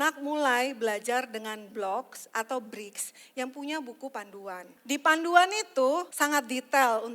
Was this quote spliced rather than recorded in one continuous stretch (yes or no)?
yes